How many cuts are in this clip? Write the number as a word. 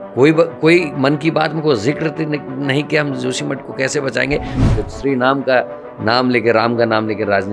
one